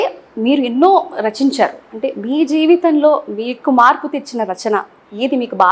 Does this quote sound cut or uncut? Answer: uncut